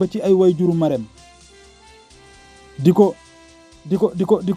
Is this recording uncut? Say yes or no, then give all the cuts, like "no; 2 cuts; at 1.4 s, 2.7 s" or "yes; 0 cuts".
no; 2 cuts; at 1.2 s, 2.5 s